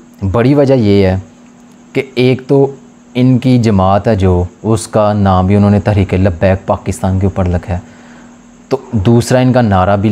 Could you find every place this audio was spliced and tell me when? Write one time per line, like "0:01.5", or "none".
none